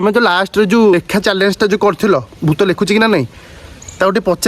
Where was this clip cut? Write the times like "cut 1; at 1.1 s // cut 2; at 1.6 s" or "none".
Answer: cut 1; at 0.9 s